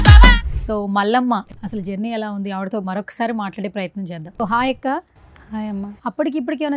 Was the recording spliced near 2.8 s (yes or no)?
no